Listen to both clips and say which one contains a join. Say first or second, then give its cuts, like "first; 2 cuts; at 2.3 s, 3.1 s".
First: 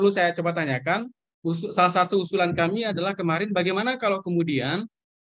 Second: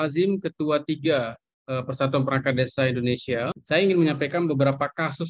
second; 1 cut; at 3.6 s